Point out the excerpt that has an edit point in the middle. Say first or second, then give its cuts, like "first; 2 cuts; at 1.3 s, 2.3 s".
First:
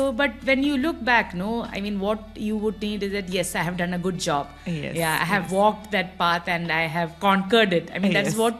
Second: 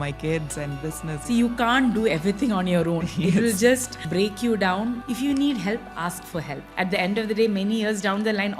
second; 4 cuts; at 1.2 s, 4.0 s, 5.0 s, 6.6 s